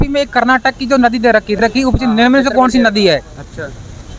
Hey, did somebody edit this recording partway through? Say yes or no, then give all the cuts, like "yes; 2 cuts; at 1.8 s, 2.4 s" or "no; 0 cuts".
yes; 1 cut; at 1.6 s